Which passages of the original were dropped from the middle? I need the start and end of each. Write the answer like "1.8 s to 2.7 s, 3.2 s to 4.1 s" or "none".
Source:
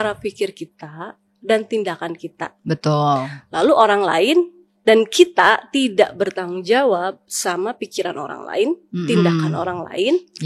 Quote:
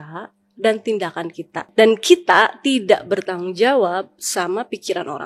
2.4 s to 4.6 s